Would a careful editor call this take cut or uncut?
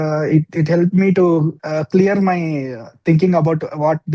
cut